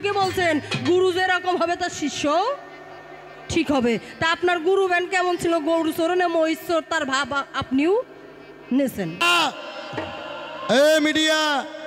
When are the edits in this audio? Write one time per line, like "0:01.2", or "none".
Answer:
0:09.2